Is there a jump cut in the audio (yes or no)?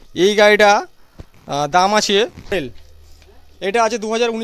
yes